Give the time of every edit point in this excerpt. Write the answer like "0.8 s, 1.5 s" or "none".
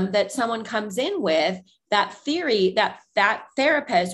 none